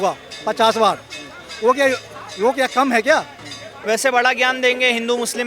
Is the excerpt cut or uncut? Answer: cut